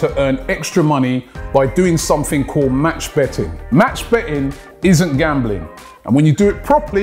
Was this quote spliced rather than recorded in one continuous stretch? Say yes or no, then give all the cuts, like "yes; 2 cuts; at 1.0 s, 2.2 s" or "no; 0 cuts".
no; 0 cuts